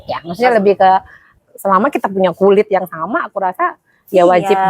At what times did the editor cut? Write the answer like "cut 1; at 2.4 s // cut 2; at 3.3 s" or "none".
cut 1; at 1.4 s